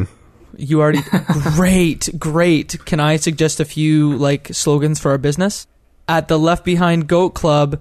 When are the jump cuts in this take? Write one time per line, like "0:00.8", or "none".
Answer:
0:06.0